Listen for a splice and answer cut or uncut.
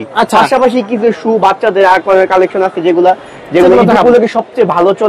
uncut